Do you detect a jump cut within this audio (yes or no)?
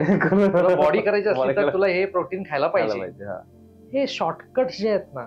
no